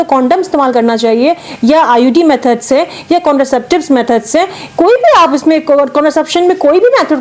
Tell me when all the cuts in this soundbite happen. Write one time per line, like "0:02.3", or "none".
none